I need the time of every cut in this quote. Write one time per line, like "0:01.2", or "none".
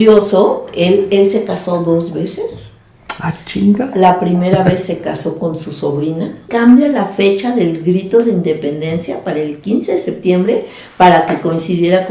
0:06.5